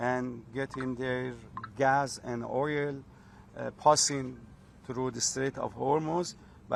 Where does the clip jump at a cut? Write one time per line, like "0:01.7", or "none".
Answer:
none